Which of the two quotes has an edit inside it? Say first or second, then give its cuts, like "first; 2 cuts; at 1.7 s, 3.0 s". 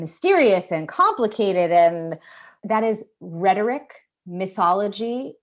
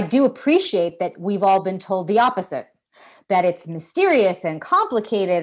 first; 1 cut; at 2.6 s